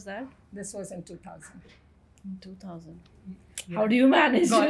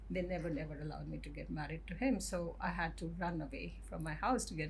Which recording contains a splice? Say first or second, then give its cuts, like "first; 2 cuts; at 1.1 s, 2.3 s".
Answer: first; 1 cut; at 3.1 s